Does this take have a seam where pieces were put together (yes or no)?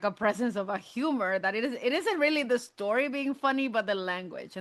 no